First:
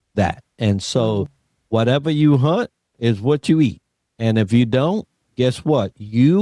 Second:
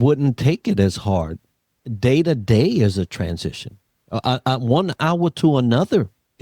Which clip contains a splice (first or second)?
second